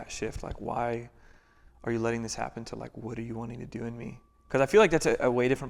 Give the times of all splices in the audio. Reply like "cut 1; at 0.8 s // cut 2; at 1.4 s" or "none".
none